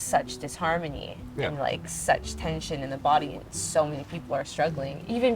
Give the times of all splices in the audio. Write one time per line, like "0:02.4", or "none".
none